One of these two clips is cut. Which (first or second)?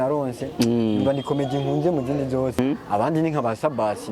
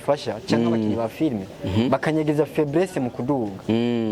first